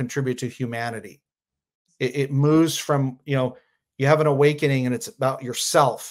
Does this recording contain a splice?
no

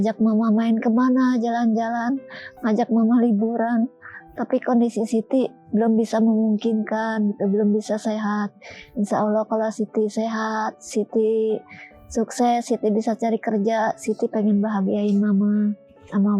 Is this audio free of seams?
yes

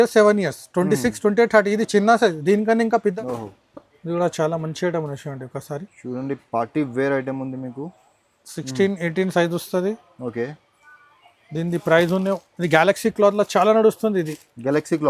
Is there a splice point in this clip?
yes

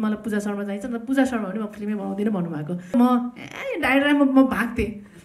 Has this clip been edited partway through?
yes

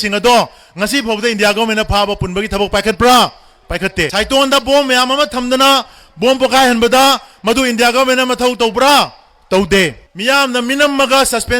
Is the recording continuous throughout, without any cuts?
no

